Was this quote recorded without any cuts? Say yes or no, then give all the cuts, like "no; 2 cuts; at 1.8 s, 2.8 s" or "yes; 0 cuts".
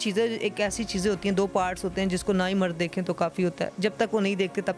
yes; 0 cuts